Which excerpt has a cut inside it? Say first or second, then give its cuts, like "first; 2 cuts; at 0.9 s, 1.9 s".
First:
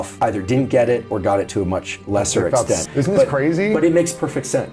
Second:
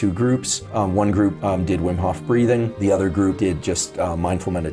first; 1 cut; at 2.8 s